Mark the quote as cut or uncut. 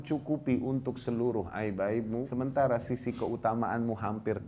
cut